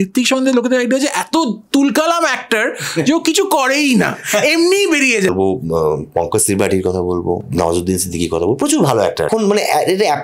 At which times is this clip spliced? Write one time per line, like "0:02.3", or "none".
0:05.3
0:07.5
0:09.3